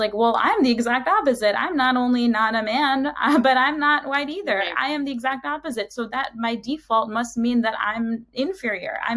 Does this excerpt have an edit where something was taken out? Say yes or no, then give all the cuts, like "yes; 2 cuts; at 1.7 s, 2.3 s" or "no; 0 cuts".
no; 0 cuts